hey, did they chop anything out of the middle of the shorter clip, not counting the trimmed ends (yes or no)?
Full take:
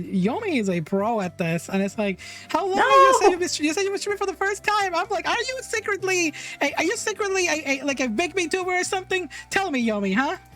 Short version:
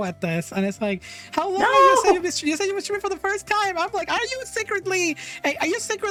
no